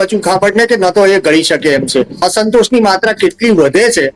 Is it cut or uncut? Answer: cut